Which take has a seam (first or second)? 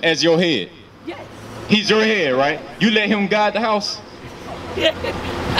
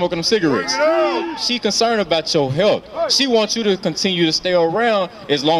second